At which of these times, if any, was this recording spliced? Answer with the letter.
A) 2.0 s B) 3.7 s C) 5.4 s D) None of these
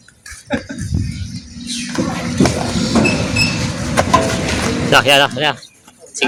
D